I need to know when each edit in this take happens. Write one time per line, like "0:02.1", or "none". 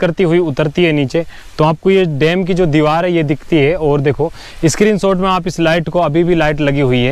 none